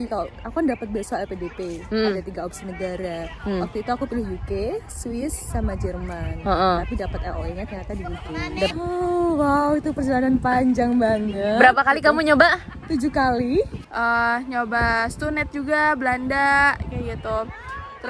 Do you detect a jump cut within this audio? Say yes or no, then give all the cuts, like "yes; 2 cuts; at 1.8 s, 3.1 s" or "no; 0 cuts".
yes; 2 cuts; at 8.7 s, 13.8 s